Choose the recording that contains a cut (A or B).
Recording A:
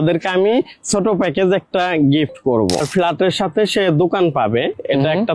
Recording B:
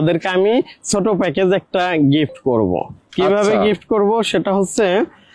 A